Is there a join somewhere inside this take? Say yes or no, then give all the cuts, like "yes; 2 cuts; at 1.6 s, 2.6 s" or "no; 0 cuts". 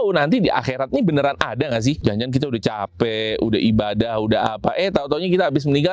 yes; 1 cut; at 2.0 s